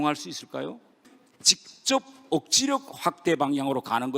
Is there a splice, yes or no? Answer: yes